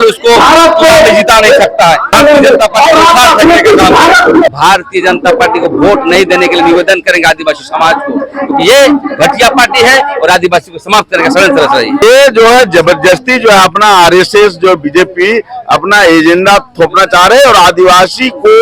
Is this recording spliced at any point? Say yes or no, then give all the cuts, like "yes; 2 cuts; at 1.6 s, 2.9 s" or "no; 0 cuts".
yes; 3 cuts; at 2.1 s, 4.5 s, 12.0 s